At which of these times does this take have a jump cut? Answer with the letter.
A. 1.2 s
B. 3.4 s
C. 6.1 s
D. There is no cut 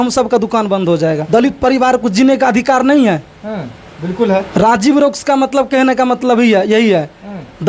A